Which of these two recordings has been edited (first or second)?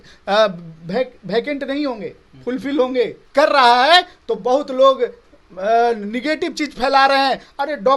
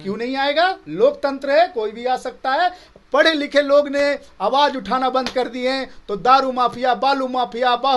first